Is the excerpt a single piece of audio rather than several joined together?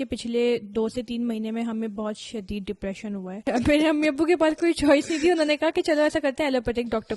no; 1 cut; at 3.5 s

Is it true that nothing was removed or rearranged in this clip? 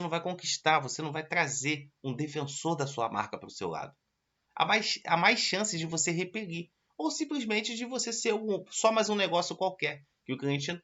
yes; 0 cuts

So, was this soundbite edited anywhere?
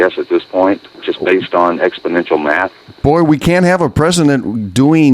yes; 1 cut; at 0.9 s

